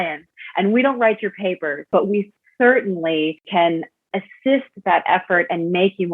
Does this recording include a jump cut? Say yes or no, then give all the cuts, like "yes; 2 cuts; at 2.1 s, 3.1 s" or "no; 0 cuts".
yes; 2 cuts; at 1.9 s, 3.4 s